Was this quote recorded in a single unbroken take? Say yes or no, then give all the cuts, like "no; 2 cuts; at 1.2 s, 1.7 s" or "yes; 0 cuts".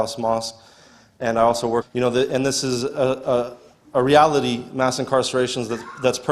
yes; 0 cuts